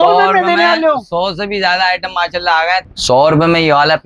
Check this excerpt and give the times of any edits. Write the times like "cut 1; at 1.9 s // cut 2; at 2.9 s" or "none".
cut 1; at 2.9 s